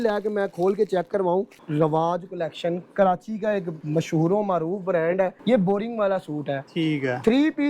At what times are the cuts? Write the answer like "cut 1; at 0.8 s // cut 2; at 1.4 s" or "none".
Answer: cut 1; at 1.6 s // cut 2; at 3.8 s // cut 3; at 5.4 s